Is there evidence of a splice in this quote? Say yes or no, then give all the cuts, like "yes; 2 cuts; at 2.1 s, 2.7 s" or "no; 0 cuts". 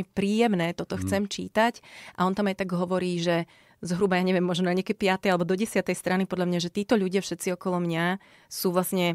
no; 0 cuts